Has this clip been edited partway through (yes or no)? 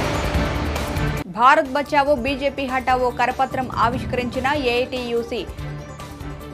yes